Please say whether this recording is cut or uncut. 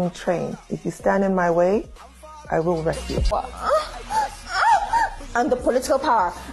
cut